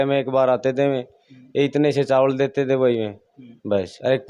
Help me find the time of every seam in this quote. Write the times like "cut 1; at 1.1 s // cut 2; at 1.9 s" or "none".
none